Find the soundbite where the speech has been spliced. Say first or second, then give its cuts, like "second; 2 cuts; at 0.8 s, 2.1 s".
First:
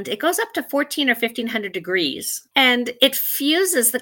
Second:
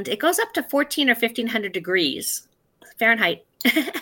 first; 1 cut; at 2.3 s